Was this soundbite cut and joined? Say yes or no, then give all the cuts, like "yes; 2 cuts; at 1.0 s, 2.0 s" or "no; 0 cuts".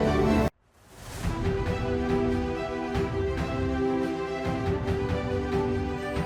no; 0 cuts